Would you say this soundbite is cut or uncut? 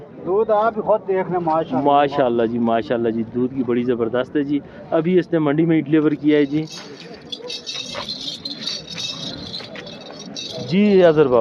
uncut